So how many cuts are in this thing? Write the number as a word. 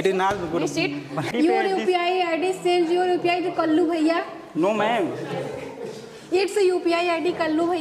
one